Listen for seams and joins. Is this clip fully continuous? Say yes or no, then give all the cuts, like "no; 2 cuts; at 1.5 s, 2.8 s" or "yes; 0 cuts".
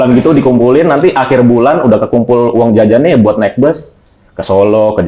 yes; 0 cuts